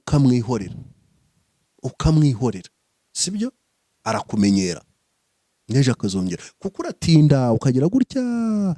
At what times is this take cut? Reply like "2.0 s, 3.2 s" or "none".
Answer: none